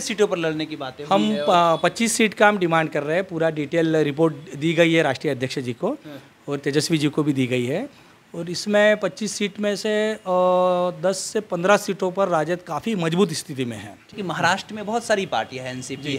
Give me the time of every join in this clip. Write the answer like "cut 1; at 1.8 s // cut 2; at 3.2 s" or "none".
cut 1; at 14.1 s